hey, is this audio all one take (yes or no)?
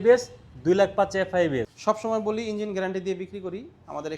no